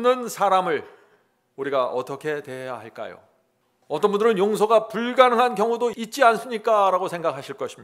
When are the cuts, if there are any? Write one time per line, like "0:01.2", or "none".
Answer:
0:06.0